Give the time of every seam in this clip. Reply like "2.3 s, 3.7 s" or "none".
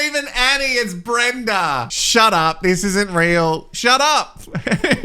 2.0 s